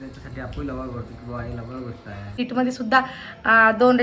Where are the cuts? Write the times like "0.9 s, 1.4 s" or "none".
2.3 s